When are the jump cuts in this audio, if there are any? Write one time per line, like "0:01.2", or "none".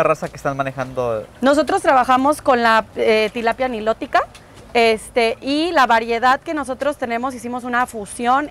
0:01.3